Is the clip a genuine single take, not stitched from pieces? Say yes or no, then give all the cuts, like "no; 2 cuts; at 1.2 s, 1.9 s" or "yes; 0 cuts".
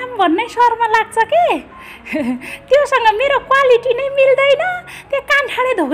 yes; 0 cuts